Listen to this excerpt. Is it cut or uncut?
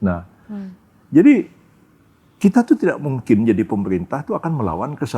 uncut